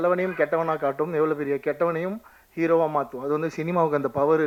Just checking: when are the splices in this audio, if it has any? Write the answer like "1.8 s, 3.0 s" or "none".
none